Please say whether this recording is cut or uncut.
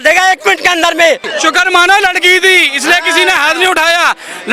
cut